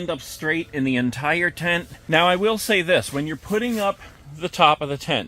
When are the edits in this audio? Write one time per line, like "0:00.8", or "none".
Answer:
none